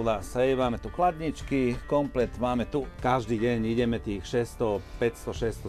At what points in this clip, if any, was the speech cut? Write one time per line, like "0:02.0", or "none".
0:02.9